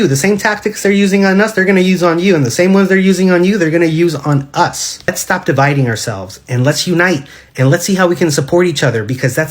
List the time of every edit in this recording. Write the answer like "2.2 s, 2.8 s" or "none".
5.1 s

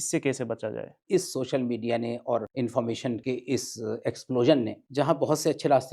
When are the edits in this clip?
1.0 s, 2.5 s, 3.2 s, 4.8 s

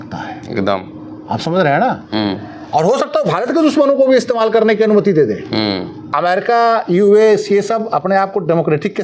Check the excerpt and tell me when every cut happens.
6.1 s

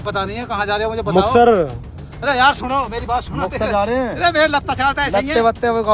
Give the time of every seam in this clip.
none

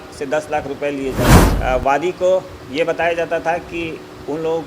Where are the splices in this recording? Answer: 1.4 s

